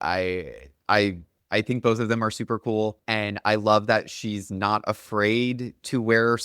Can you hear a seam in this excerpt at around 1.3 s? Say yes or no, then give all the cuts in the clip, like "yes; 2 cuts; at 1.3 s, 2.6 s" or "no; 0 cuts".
yes; 2 cuts; at 1.3 s, 3.0 s